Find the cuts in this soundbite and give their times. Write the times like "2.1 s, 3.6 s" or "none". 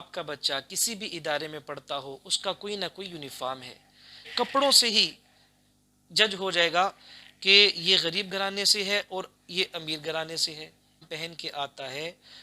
4.3 s, 11.0 s